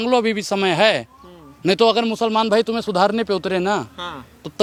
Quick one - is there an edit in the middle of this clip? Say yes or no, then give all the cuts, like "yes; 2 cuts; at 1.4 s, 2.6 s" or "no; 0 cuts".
no; 0 cuts